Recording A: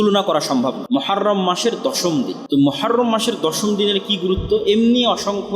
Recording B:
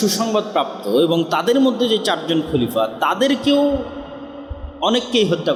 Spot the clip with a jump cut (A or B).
A